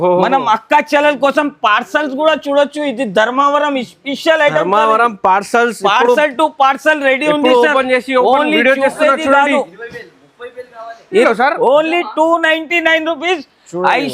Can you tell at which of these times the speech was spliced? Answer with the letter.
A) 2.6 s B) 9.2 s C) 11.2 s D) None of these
C